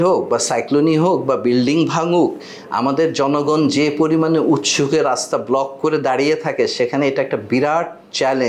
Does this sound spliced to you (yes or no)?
no